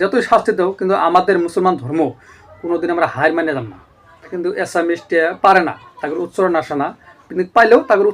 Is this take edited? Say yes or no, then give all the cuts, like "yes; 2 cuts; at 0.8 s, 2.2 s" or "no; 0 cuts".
yes; 1 cut; at 4.3 s